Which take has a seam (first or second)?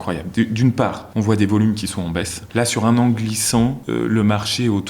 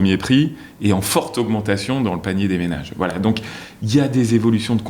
first